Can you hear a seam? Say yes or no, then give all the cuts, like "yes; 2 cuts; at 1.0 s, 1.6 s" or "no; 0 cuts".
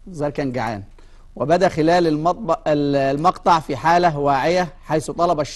yes; 1 cut; at 3.6 s